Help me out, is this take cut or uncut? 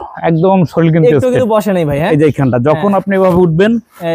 uncut